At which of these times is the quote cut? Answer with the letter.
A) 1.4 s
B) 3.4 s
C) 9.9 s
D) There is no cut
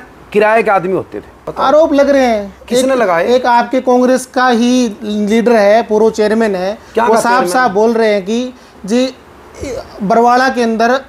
A